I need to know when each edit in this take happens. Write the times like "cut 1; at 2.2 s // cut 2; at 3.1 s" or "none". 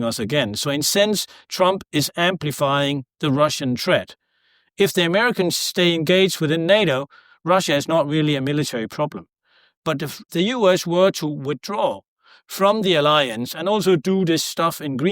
cut 1; at 10.2 s